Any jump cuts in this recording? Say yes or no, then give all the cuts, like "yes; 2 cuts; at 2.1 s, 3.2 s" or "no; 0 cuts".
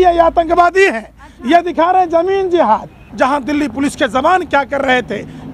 yes; 1 cut; at 3.0 s